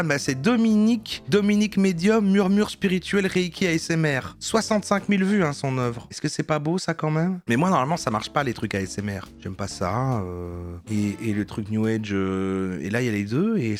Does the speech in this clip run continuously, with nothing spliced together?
yes; 0 cuts

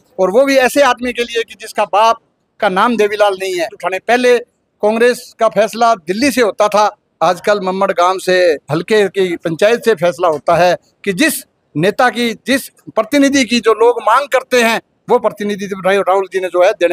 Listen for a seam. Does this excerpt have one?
yes; 1 cut; at 3.9 s

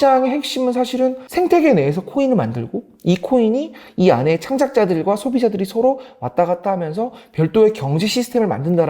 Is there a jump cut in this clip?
yes; 1 cut; at 1.2 s

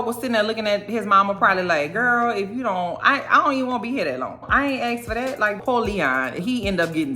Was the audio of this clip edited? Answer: yes; 1 cut; at 5.6 s

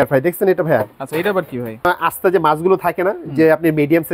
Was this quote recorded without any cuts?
no; 1 cut; at 1.9 s

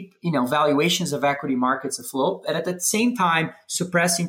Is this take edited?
no; 0 cuts

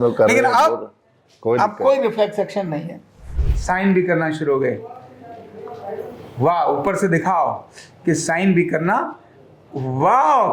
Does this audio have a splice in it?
yes; 1 cut; at 3.5 s

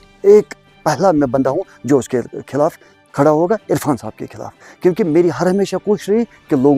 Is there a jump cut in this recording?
no; 0 cuts

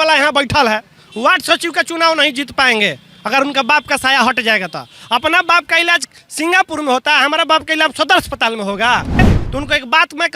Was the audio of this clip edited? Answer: yes; 1 cut; at 9.3 s

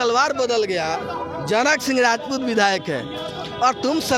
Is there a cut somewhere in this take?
no; 0 cuts

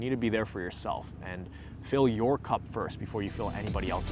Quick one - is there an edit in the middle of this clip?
no; 0 cuts

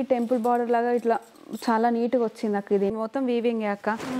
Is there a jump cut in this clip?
yes; 1 cut; at 2.9 s

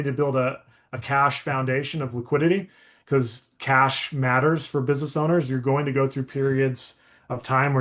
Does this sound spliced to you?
no; 0 cuts

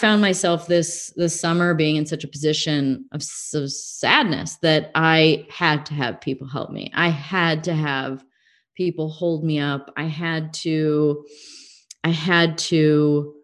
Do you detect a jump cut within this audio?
no; 0 cuts

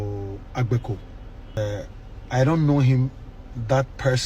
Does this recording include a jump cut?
yes; 1 cut; at 1.6 s

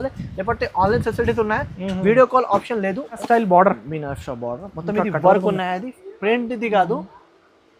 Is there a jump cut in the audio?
yes; 1 cut; at 3.2 s

